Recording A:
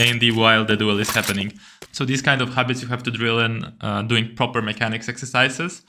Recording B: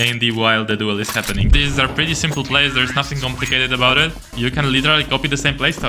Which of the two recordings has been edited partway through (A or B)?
B